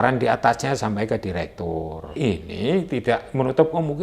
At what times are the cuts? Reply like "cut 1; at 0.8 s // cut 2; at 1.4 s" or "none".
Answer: cut 1; at 2.2 s